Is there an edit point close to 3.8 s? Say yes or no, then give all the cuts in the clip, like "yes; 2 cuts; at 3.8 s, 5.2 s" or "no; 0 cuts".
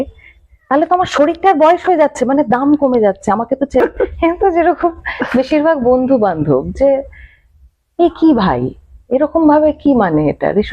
yes; 1 cut; at 3.8 s